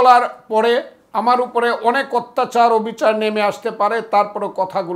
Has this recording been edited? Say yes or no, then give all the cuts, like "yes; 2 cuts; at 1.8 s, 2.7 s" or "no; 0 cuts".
yes; 1 cut; at 1.0 s